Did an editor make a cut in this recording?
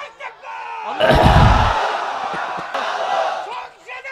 yes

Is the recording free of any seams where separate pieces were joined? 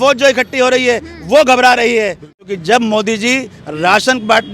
no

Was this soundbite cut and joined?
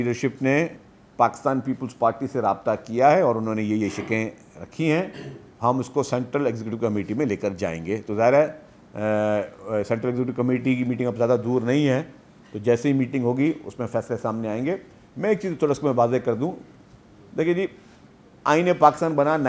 no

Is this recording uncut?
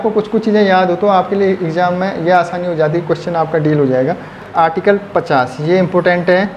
no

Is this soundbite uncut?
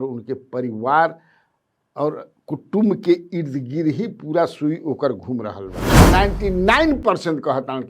no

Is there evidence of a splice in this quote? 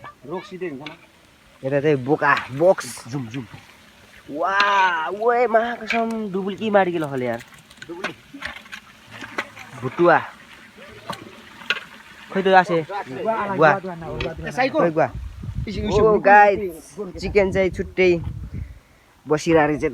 no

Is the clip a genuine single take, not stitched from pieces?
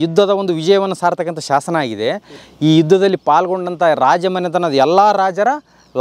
yes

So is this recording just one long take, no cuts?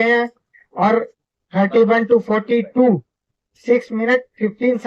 yes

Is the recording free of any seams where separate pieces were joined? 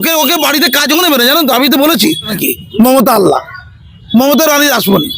no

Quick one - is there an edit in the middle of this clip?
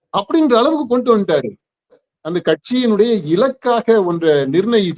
yes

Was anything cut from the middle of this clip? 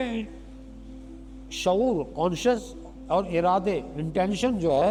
no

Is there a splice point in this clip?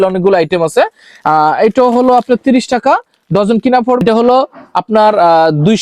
yes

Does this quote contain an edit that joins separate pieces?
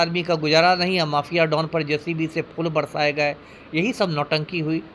no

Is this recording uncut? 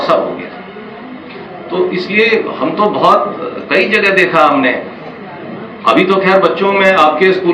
yes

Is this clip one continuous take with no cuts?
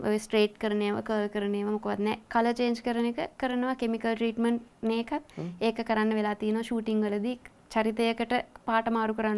yes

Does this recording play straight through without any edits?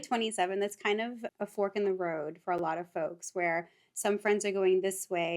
no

